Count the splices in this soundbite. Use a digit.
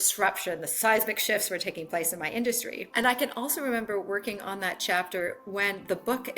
1